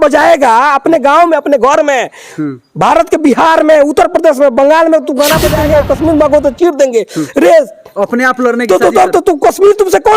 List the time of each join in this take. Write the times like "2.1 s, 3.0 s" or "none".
5.5 s